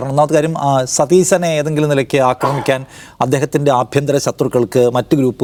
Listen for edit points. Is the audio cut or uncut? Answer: uncut